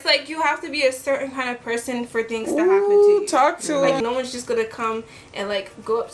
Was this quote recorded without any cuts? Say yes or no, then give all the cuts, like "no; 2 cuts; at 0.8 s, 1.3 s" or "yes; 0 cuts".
no; 1 cut; at 4.0 s